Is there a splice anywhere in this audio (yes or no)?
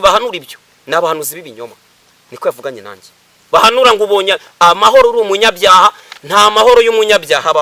no